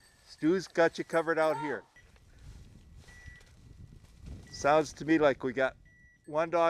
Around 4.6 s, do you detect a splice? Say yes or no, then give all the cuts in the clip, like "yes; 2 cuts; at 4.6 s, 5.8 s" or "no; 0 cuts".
no; 1 cut; at 2.0 s